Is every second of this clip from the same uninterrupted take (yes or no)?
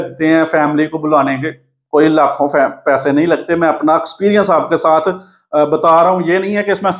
yes